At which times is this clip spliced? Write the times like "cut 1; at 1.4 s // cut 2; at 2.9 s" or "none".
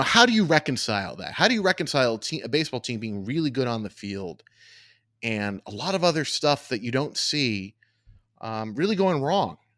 none